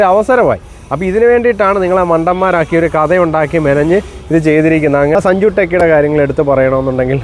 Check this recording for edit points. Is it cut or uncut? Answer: cut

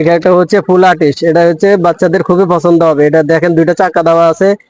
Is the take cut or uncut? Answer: uncut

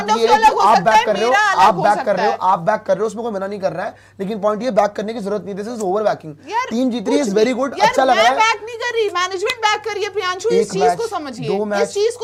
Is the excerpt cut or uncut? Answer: uncut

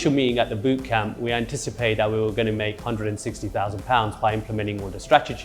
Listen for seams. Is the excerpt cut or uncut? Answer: uncut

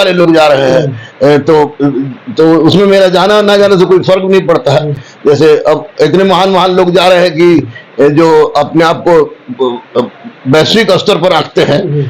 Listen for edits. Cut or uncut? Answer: uncut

